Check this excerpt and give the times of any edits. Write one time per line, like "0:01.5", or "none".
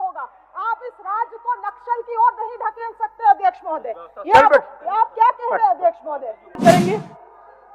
0:06.6